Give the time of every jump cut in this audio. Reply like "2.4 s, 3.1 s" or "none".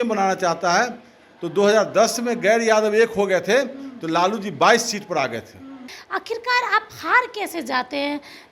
5.9 s